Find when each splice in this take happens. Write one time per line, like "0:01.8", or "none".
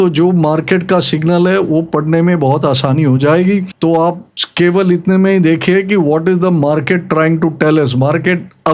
none